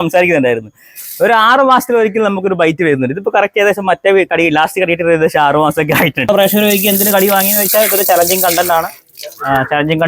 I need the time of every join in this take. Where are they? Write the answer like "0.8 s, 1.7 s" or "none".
6.3 s